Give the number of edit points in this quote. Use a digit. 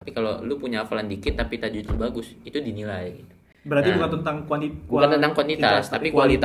0